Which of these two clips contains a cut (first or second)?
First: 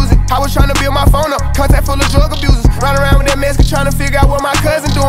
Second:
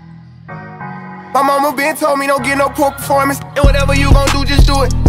second